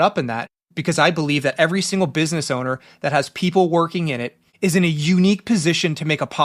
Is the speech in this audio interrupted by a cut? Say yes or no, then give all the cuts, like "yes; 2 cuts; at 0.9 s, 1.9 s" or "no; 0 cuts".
no; 0 cuts